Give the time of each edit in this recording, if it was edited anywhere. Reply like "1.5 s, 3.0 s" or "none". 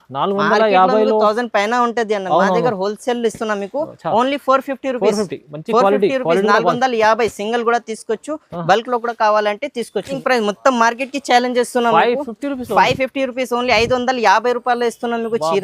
10.2 s